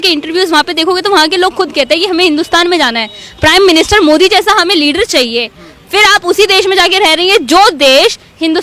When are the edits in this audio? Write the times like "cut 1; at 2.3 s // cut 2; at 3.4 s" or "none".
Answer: none